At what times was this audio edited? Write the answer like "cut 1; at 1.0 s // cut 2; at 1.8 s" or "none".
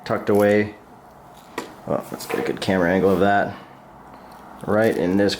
none